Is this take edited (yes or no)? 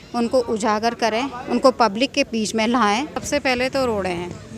yes